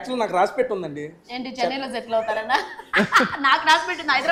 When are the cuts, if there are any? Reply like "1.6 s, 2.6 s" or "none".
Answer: none

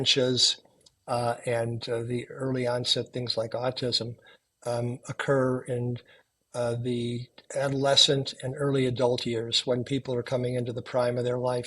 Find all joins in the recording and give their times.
7.4 s

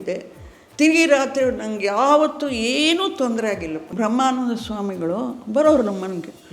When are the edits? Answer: 3.9 s

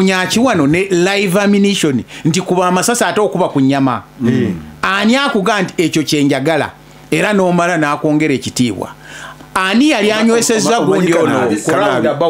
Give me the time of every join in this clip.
none

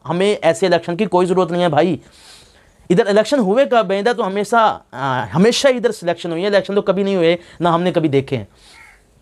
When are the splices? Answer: none

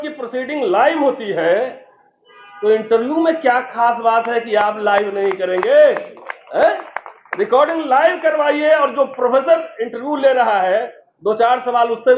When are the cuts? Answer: none

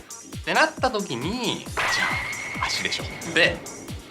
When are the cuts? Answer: 2.0 s

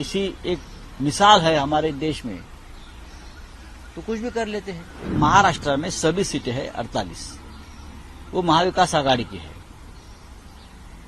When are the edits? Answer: 5.0 s

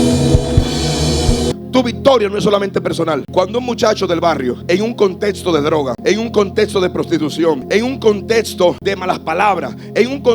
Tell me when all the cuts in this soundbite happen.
1.6 s, 3.3 s, 4.6 s, 5.9 s, 7.6 s, 8.8 s

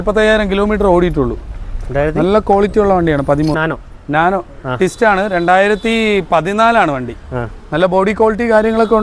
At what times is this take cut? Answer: 3.6 s

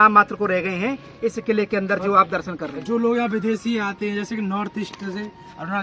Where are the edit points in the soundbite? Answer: none

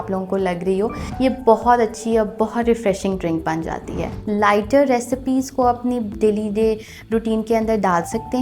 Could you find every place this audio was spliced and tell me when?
1.0 s, 4.1 s

